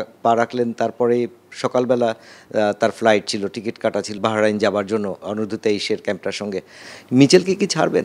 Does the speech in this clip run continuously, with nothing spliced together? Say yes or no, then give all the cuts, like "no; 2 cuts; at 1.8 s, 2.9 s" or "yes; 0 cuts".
no; 3 cuts; at 4.1 s, 5.2 s, 6.8 s